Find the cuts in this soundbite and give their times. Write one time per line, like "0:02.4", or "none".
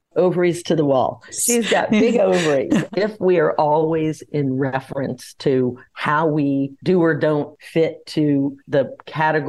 0:01.3
0:02.9
0:05.9
0:06.8
0:07.6
0:08.6